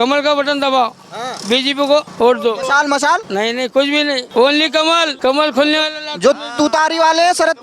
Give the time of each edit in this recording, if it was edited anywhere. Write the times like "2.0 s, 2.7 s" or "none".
2.1 s, 3.3 s, 4.2 s, 5.1 s